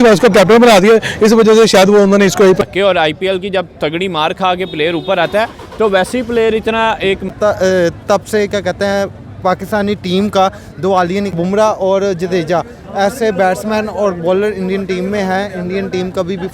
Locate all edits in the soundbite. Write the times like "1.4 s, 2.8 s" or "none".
2.6 s, 7.3 s, 11.7 s